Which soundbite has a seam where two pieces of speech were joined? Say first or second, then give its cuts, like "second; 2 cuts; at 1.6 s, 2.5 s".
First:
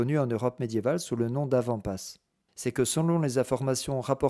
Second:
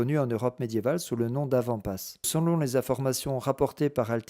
second; 1 cut; at 2.3 s